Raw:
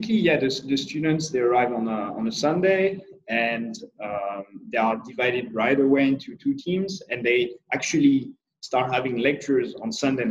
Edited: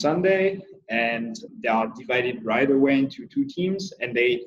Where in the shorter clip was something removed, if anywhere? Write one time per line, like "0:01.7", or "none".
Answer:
0:01.5